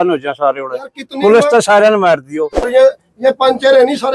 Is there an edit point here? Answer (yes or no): yes